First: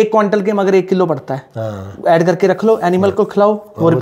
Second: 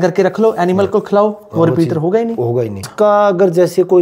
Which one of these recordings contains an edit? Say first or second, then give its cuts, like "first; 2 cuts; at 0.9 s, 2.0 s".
second; 1 cut; at 2.9 s